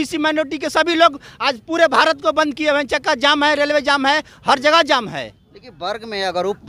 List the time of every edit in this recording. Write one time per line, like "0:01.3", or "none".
none